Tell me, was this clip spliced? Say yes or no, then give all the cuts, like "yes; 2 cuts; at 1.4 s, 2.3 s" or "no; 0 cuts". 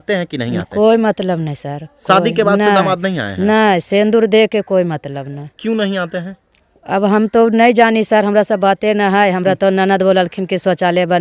no; 0 cuts